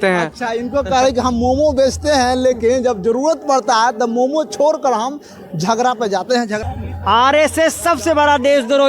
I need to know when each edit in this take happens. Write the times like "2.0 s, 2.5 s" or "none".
6.7 s